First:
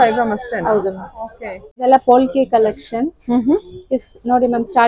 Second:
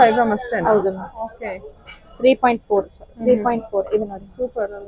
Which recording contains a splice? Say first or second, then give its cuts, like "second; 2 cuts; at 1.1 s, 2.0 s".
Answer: first; 1 cut; at 1.6 s